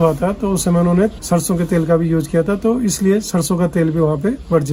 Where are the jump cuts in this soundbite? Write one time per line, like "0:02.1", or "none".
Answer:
none